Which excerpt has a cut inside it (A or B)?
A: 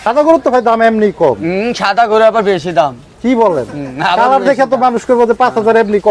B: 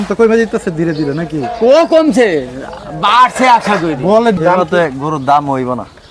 B